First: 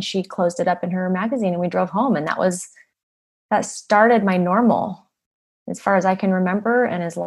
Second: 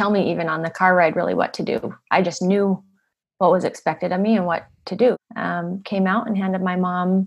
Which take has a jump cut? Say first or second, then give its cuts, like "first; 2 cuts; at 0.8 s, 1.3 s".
second; 1 cut; at 5.2 s